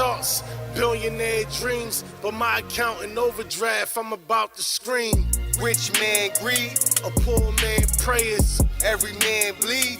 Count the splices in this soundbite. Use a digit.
1